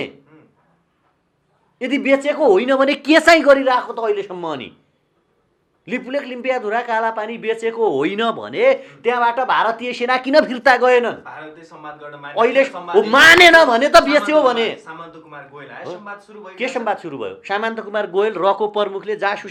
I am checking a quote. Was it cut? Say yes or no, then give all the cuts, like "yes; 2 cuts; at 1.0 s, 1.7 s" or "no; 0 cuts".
no; 0 cuts